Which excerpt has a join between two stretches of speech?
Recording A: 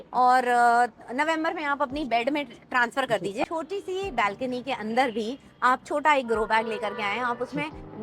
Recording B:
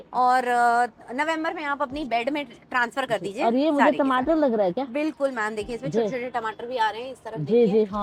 A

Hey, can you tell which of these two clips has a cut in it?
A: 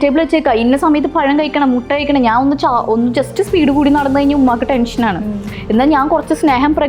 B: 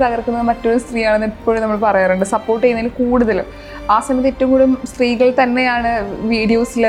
A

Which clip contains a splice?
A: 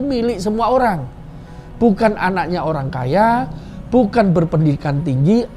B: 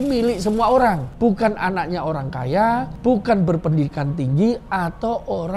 B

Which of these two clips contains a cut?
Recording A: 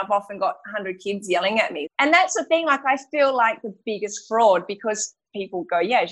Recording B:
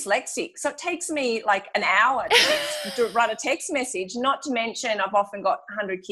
A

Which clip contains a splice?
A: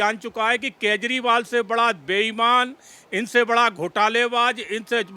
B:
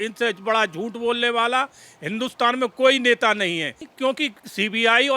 B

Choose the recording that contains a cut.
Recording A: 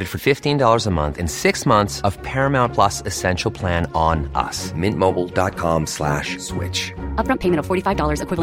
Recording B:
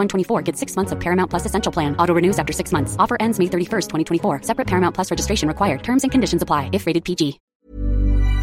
B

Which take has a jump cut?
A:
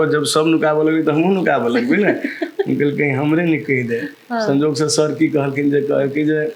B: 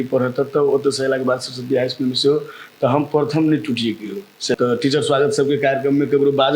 B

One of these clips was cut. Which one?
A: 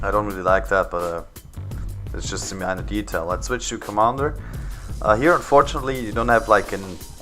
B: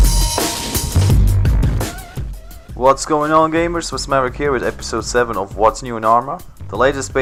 A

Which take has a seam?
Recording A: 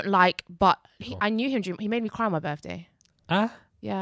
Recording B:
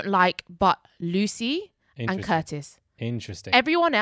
A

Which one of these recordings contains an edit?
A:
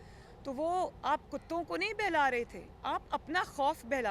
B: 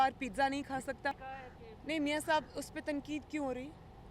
B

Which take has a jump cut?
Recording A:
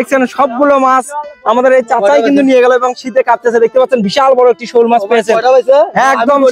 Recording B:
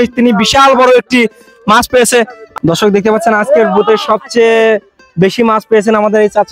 B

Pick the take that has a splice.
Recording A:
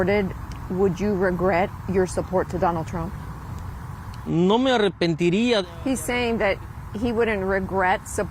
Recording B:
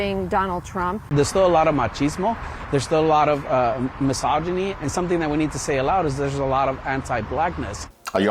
B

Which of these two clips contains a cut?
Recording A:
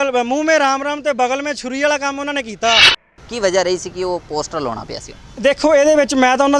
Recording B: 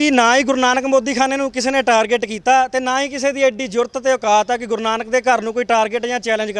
A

